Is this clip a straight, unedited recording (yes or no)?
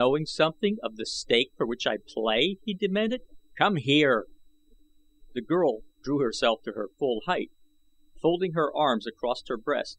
yes